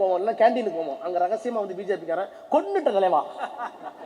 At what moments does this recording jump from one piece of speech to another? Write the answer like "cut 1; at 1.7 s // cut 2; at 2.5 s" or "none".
none